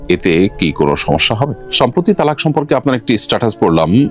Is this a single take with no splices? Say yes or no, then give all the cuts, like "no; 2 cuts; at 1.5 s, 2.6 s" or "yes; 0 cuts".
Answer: no; 1 cut; at 1.6 s